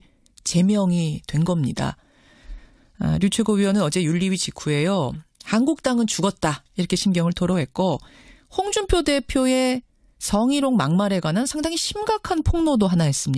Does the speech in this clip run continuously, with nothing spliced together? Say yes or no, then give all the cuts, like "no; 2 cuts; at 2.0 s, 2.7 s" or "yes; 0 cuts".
yes; 0 cuts